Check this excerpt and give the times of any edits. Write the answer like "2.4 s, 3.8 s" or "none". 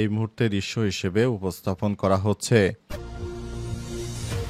2.8 s